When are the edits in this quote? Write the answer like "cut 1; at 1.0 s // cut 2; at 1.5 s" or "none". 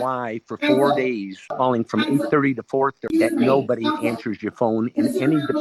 cut 1; at 1.5 s // cut 2; at 3.0 s